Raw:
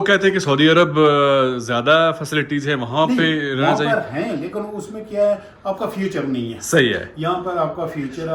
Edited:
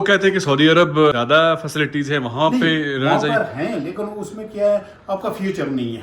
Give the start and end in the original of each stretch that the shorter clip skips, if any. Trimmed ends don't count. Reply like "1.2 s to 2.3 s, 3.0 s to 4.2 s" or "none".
1.1 s to 1.7 s